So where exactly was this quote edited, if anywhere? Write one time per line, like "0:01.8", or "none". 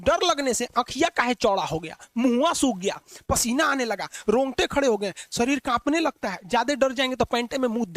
none